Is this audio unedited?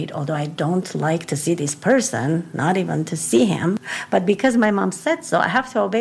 no; 1 cut; at 3.8 s

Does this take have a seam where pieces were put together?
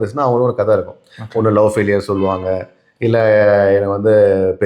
no; 0 cuts

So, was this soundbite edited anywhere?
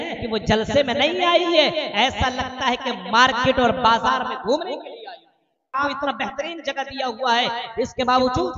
yes; 1 cut; at 5.7 s

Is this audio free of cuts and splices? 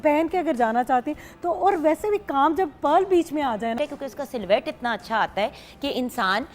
no; 1 cut; at 3.8 s

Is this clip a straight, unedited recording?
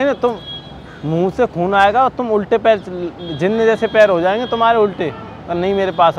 yes; 0 cuts

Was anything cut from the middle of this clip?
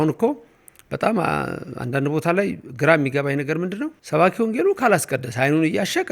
yes; 1 cut; at 4.0 s

